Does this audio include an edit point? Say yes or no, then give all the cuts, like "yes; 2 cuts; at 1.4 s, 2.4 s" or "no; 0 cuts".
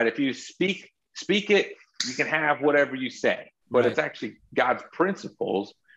yes; 1 cut; at 3.5 s